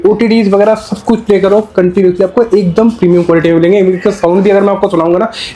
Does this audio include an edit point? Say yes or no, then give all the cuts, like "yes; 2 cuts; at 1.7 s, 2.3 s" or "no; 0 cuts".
no; 0 cuts